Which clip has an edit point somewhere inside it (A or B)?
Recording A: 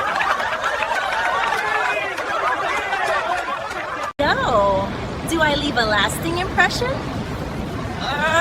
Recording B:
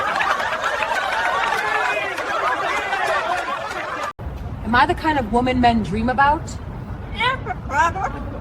B